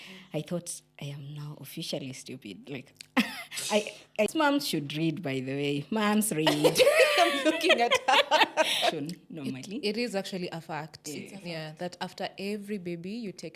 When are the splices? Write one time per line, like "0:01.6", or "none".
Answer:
0:04.3
0:09.0